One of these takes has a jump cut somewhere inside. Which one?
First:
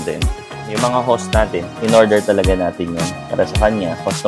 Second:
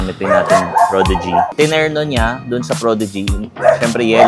second; 1 cut; at 1.5 s

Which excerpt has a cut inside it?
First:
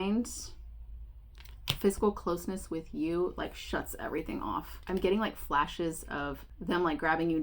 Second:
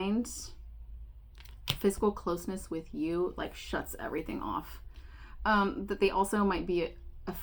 first; 2 cuts; at 4.7 s, 6.5 s

